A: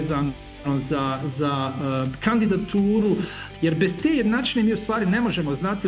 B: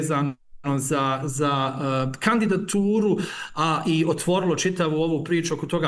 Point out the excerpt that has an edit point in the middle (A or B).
A